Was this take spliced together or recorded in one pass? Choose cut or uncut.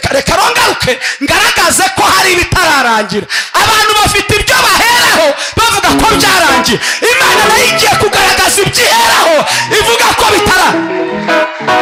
uncut